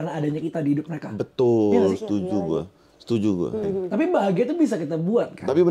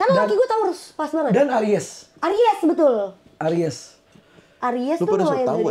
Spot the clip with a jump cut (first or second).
first